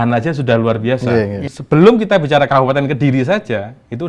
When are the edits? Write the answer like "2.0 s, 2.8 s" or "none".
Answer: 1.5 s